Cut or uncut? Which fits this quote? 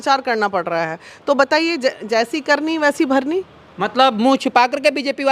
uncut